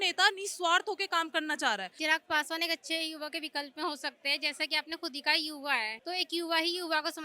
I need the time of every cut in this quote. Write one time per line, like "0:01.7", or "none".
0:01.9
0:05.9